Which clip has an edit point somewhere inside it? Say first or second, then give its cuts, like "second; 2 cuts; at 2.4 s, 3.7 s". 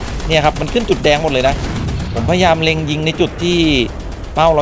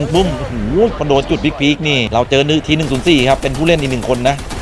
second; 1 cut; at 2.0 s